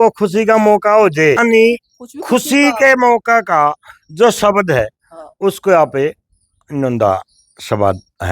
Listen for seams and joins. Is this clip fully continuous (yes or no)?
no